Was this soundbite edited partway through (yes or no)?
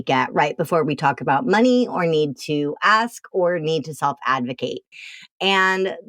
no